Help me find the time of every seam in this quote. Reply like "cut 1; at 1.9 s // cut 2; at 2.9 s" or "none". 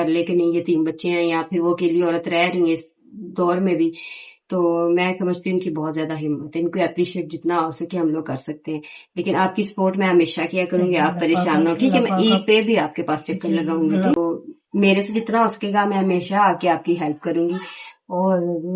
cut 1; at 14.1 s